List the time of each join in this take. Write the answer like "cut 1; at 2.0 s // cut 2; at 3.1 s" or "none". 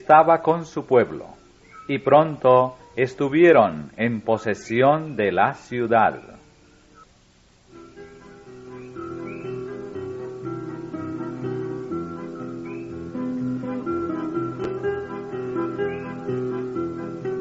cut 1; at 16.2 s